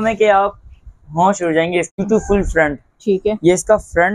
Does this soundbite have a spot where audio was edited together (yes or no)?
yes